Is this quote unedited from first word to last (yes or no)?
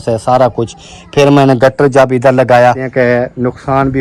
no